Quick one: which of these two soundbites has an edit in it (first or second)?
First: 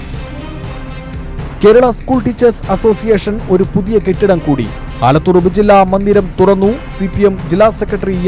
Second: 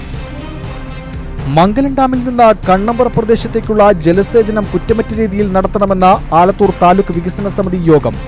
second